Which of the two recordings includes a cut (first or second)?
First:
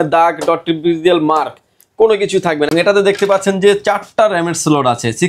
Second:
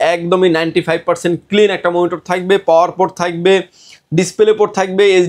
first